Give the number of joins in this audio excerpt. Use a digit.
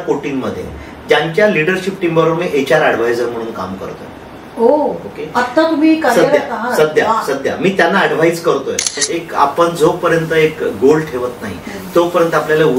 1